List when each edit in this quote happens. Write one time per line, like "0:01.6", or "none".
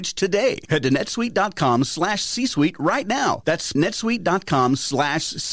0:03.7